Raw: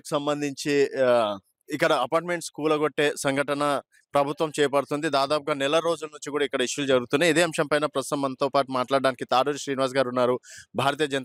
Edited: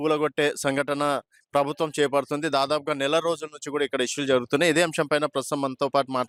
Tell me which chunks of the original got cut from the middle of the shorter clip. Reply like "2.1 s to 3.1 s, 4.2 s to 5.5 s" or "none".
none